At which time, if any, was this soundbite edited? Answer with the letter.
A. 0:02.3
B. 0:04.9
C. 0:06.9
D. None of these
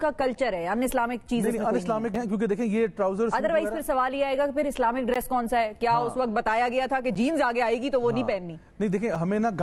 D